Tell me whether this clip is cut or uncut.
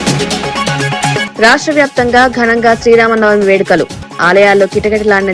cut